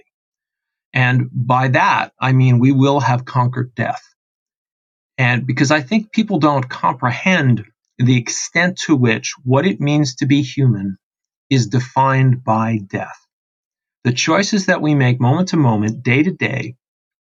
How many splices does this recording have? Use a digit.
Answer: 0